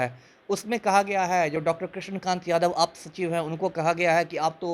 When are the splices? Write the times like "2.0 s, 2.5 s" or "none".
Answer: none